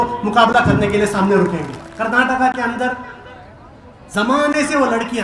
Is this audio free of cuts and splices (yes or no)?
no